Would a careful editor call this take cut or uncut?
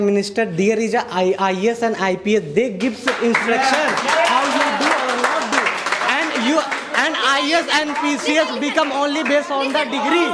uncut